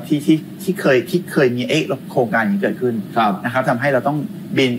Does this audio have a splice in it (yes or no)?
no